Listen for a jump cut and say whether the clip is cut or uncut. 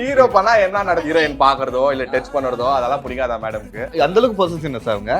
cut